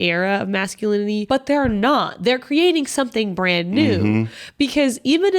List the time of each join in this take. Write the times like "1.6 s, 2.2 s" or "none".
1.2 s